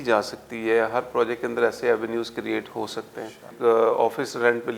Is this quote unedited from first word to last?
no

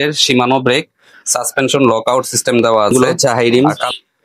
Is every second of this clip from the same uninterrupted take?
no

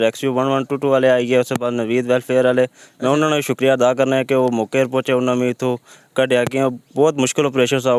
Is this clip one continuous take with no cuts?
yes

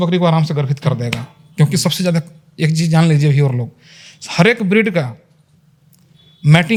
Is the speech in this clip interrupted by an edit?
no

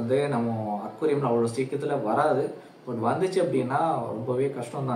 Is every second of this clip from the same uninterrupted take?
yes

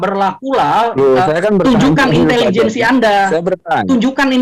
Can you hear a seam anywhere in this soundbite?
no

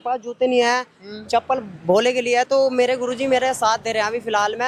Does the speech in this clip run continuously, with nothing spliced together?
yes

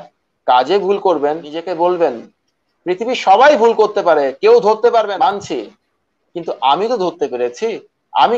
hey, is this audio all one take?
no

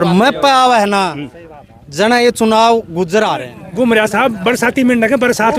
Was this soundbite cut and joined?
yes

